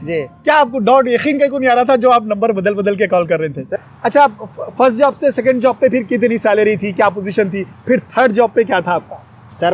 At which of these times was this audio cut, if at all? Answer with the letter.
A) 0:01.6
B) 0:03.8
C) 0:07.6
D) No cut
B